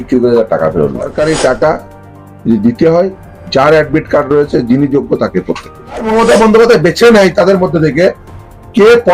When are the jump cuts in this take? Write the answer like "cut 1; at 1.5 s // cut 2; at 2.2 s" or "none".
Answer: cut 1; at 1.1 s // cut 2; at 6.1 s